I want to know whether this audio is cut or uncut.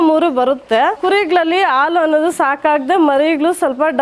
cut